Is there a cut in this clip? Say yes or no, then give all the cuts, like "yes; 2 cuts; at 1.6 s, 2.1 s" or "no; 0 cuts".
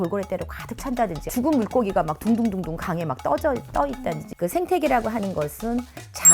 yes; 1 cut; at 4.3 s